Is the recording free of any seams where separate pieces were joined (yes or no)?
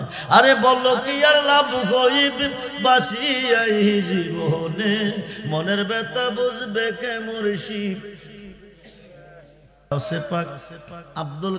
no